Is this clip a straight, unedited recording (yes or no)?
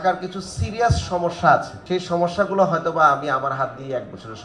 yes